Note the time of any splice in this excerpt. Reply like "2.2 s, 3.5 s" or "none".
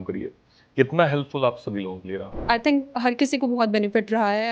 2.4 s